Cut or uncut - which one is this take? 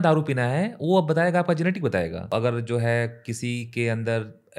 cut